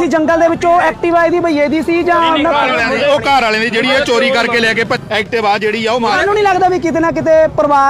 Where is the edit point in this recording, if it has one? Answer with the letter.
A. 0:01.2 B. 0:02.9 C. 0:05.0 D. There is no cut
C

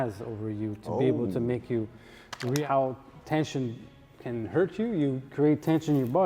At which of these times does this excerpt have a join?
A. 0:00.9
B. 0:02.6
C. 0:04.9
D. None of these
B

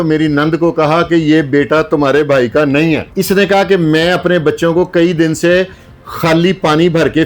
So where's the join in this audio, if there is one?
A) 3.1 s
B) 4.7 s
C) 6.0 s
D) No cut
A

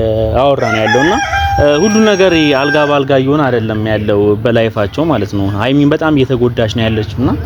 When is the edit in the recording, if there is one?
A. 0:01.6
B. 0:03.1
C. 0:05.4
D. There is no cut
D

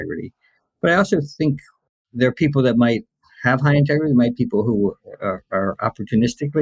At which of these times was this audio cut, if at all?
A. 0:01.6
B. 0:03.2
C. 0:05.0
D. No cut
D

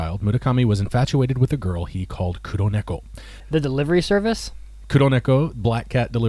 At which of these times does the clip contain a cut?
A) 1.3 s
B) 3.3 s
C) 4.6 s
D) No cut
B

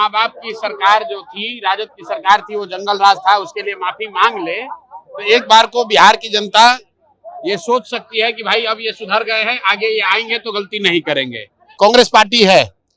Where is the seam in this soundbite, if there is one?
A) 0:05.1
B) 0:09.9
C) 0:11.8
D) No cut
C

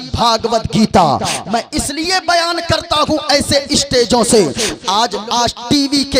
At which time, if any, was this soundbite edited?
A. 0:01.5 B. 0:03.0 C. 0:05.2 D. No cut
C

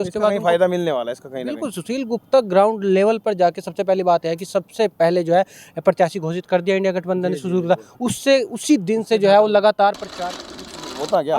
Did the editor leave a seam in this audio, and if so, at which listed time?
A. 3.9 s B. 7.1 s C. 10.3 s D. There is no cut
C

